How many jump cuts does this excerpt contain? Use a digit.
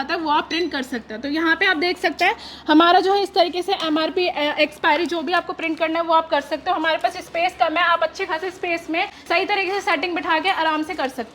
0